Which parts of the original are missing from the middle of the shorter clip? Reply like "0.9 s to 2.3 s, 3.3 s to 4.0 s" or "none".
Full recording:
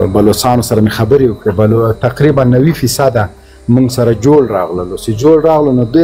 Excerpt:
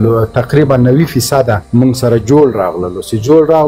3.3 s to 3.6 s